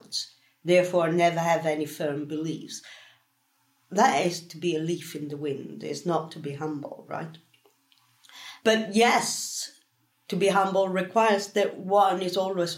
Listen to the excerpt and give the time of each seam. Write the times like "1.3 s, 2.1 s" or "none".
1.2 s